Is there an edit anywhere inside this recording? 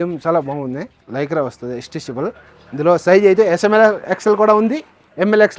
yes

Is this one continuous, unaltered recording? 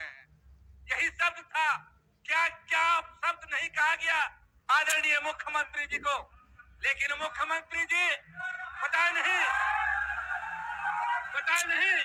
yes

